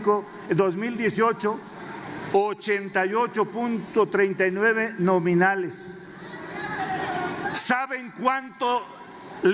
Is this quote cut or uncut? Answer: uncut